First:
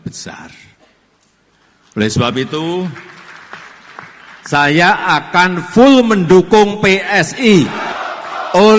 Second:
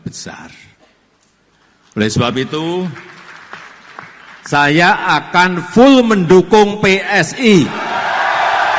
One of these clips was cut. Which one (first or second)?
first